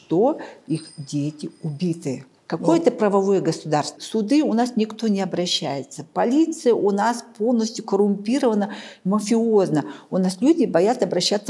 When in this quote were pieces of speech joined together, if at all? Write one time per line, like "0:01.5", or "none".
0:02.3
0:04.0